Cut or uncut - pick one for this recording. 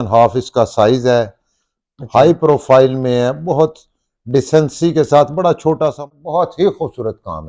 cut